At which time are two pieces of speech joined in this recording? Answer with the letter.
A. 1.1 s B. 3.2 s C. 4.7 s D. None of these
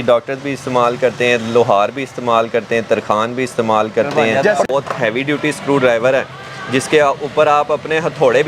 C